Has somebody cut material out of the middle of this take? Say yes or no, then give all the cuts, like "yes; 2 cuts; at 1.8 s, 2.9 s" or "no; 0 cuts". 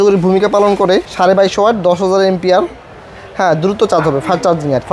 yes; 1 cut; at 1.1 s